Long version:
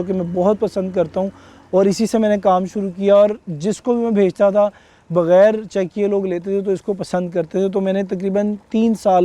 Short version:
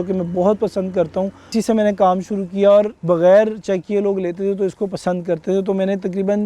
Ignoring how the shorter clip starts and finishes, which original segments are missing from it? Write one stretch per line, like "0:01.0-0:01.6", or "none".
0:01.5-0:02.0
0:03.4-0:05.0